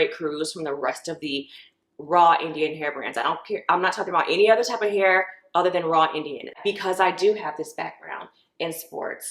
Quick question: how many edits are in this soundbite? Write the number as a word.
one